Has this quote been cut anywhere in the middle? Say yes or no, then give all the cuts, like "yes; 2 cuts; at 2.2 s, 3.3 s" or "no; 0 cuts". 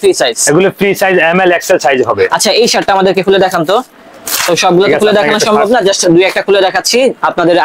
no; 0 cuts